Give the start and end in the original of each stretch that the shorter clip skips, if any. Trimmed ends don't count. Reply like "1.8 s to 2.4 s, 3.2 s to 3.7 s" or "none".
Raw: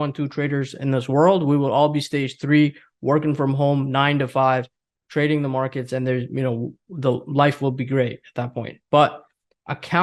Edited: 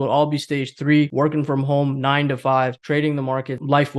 2.7 s to 3.0 s, 5.0 s to 6.8 s